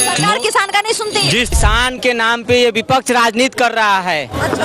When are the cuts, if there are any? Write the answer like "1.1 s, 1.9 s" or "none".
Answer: 1.5 s